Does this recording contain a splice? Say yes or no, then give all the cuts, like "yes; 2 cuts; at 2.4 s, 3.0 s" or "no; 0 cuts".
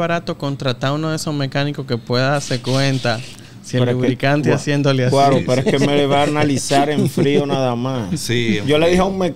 no; 0 cuts